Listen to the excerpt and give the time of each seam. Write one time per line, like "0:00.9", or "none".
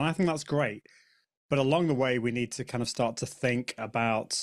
none